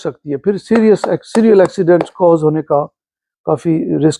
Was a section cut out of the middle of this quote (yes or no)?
no